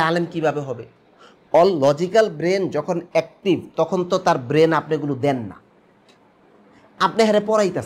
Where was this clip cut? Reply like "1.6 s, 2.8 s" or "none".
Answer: none